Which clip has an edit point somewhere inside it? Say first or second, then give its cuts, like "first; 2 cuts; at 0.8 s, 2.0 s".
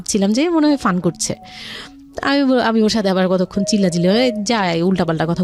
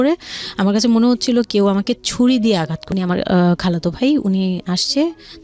second; 1 cut; at 2.8 s